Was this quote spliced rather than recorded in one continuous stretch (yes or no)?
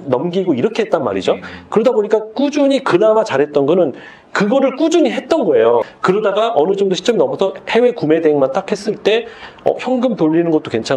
yes